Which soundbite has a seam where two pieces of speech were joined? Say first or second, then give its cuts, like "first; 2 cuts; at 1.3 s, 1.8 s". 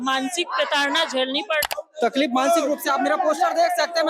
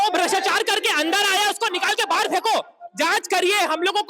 first; 1 cut; at 1.7 s